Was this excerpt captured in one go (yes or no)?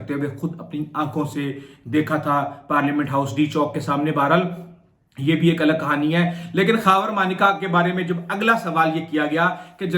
yes